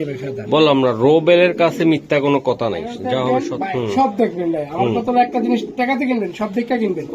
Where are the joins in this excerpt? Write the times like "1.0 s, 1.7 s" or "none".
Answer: 3.5 s